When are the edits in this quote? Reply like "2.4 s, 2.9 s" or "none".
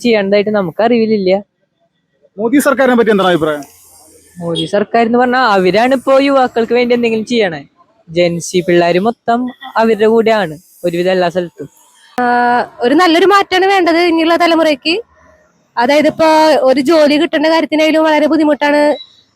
12.2 s